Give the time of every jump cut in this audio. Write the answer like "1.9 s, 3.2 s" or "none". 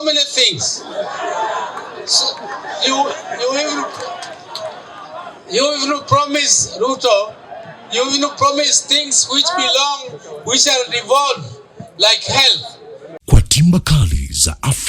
13.1 s